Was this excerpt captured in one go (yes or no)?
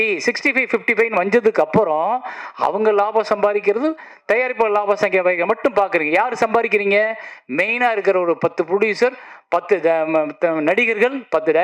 yes